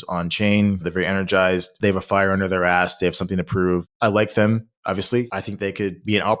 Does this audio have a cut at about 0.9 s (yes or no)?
yes